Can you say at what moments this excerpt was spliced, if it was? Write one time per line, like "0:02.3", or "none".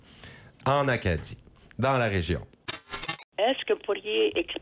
0:02.9